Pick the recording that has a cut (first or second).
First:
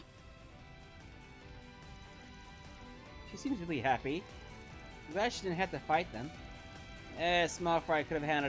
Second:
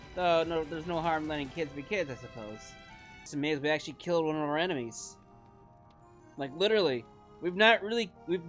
second